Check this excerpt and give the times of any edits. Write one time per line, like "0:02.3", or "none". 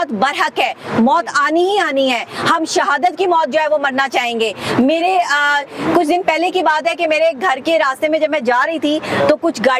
none

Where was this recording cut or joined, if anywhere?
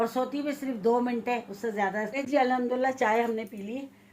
0:02.1

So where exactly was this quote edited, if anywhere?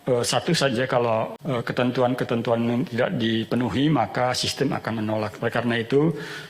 0:01.4

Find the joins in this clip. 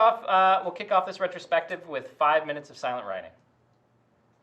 0:01.4

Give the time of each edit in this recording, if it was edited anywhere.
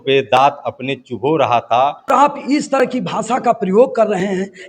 0:02.1

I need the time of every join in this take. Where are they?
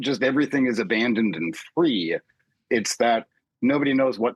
none

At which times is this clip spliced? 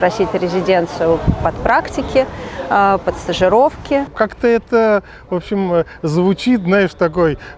0:04.1

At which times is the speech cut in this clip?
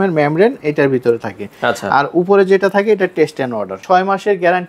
0:03.8

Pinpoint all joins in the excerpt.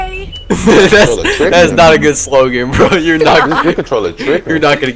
none

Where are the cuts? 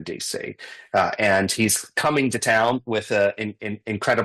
none

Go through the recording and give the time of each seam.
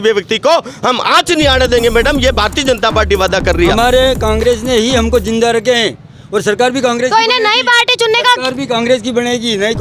0:03.7

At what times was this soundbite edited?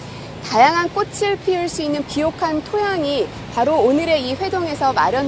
0:03.3

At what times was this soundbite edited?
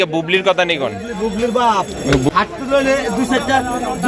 0:02.3

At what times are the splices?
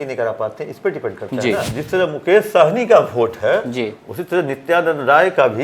0:01.8

